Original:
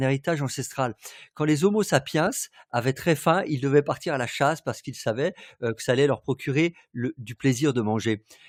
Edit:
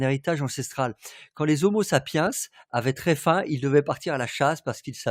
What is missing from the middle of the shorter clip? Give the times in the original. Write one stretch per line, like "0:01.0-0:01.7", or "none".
none